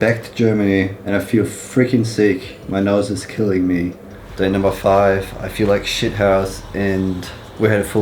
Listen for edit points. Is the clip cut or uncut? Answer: cut